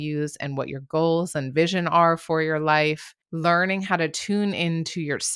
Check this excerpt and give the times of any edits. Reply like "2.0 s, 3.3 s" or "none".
3.2 s